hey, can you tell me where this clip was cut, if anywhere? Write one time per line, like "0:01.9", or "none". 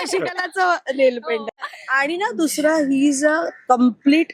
0:01.5